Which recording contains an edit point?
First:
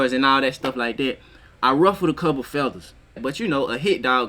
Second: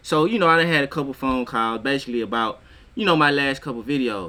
first; 1 cut; at 3.2 s

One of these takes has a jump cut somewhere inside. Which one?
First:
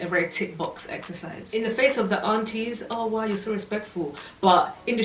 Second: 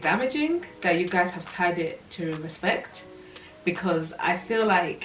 first; 1 cut; at 1.5 s

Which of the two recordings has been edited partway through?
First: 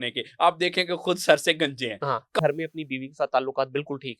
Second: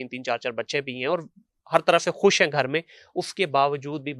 first; 1 cut; at 2.4 s

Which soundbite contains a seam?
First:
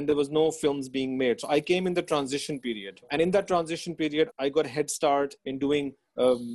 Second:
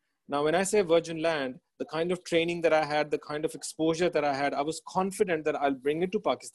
first; 3 cuts; at 3.1 s, 4.3 s, 5.4 s

